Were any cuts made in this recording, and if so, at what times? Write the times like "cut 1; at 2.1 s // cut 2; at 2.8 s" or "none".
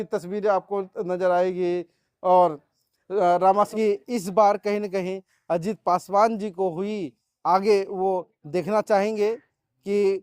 cut 1; at 3.7 s